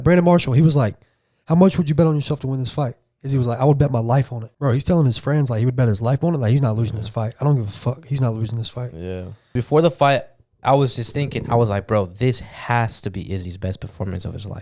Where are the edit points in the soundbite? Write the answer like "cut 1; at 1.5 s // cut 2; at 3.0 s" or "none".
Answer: cut 1; at 4.4 s // cut 2; at 9.5 s